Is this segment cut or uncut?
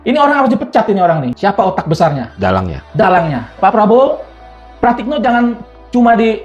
cut